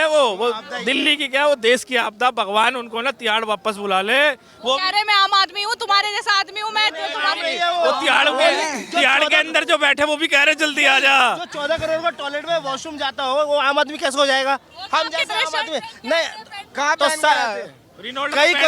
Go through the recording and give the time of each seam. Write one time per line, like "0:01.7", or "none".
none